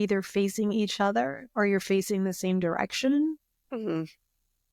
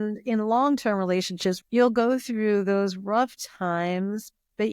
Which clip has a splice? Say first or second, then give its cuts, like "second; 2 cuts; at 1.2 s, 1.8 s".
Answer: second; 1 cut; at 1.6 s